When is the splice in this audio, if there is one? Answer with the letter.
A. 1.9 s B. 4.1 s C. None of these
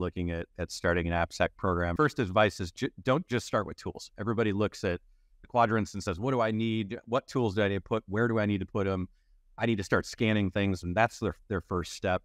A